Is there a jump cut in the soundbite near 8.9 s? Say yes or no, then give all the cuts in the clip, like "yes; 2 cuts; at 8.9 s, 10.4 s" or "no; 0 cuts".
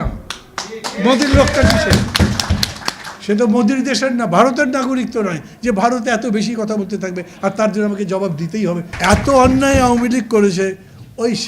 yes; 1 cut; at 8.9 s